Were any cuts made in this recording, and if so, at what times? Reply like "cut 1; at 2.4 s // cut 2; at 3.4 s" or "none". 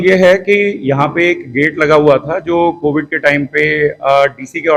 none

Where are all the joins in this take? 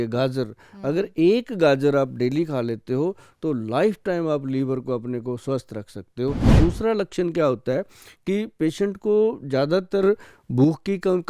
cut 1; at 6.5 s

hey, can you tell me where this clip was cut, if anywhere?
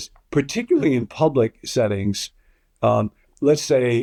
none

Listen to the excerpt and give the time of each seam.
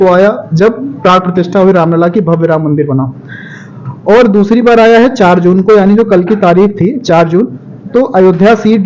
none

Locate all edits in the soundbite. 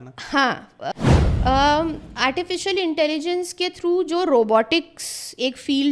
cut 1; at 0.9 s

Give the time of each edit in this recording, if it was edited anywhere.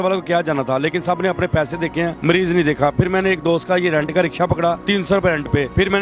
cut 1; at 2.9 s

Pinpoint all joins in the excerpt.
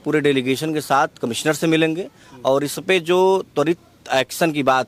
none

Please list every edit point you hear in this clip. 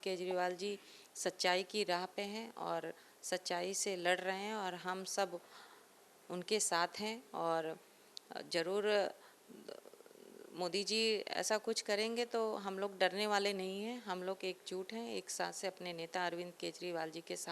none

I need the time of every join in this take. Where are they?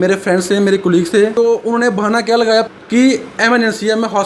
cut 1; at 1.3 s // cut 2; at 2.7 s

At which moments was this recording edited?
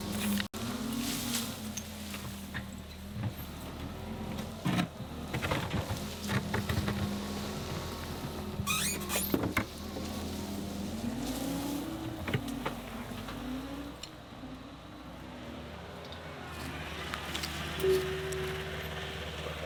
none

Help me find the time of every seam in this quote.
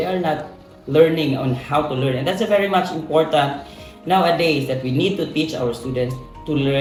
none

